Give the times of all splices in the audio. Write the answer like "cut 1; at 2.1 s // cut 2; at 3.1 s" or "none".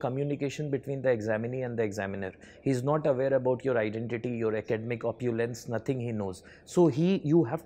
none